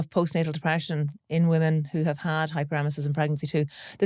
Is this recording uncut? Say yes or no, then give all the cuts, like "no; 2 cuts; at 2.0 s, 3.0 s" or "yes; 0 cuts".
yes; 0 cuts